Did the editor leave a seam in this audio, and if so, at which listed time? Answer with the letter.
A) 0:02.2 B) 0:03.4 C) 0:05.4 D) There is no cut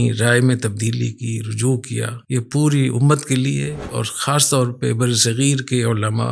A